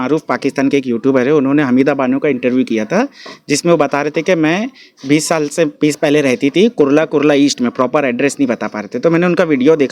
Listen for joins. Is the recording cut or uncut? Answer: uncut